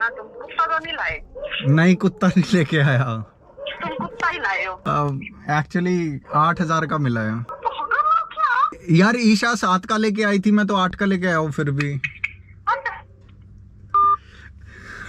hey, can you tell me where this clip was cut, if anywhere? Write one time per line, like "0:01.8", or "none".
0:04.8
0:07.5
0:08.8